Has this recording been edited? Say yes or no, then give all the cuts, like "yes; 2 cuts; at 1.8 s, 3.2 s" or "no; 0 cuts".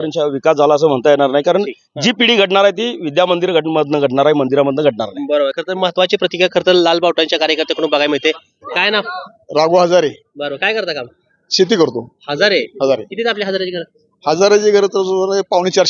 no; 0 cuts